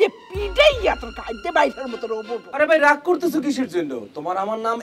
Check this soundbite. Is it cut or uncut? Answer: cut